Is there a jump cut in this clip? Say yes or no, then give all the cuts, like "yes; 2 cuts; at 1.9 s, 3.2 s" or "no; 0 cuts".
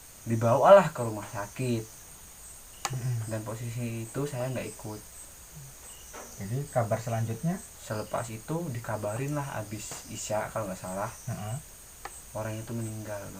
no; 0 cuts